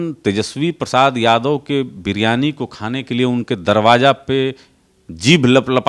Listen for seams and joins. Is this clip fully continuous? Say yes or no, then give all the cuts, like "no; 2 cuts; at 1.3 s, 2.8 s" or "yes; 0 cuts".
yes; 0 cuts